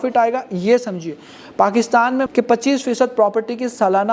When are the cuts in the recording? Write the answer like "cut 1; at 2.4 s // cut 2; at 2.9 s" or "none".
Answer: cut 1; at 2.3 s